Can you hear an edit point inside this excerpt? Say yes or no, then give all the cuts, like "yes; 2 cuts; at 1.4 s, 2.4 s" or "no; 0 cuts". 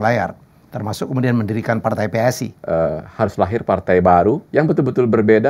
yes; 2 cuts; at 2.5 s, 4.4 s